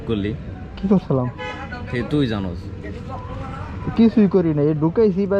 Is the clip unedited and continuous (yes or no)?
yes